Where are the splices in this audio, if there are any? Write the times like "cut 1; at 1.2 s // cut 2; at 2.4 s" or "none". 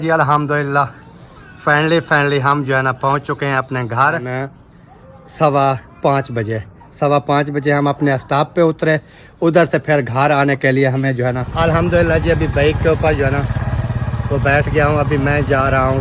cut 1; at 4.3 s // cut 2; at 11.5 s